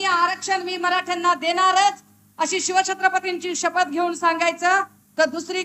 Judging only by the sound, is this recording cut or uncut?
uncut